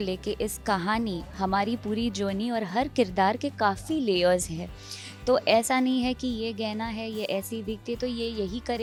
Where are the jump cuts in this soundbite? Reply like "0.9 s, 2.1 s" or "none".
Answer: none